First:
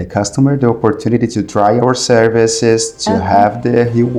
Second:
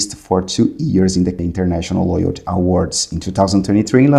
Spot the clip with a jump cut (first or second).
second